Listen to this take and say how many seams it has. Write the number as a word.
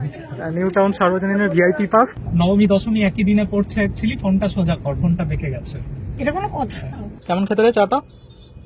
two